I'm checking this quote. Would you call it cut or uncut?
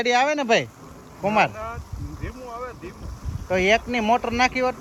uncut